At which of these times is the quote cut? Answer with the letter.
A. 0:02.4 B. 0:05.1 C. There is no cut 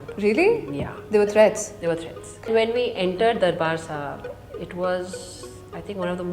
A